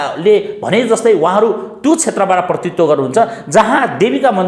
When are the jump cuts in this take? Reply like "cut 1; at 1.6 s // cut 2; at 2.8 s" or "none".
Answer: none